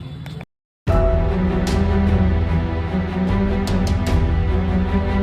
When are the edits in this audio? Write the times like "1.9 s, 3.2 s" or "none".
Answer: none